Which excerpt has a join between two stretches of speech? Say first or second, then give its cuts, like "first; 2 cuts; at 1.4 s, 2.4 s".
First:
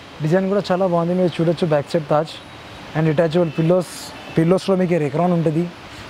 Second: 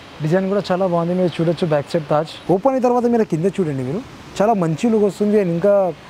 second; 1 cut; at 2.4 s